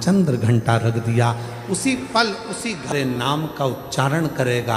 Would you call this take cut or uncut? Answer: cut